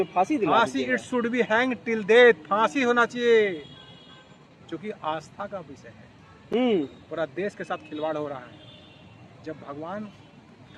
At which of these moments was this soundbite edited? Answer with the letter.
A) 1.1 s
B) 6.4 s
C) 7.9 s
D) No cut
D